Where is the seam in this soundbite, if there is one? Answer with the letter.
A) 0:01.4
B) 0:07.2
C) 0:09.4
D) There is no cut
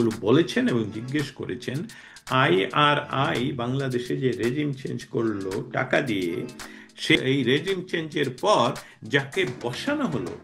B